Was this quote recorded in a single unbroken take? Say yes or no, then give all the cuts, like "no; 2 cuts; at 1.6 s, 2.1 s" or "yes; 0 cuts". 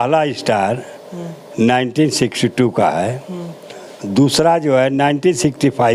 yes; 0 cuts